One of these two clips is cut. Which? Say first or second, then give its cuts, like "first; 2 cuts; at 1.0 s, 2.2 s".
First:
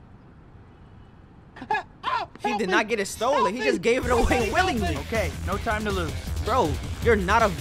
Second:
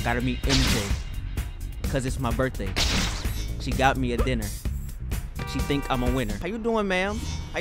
second; 1 cut; at 6.4 s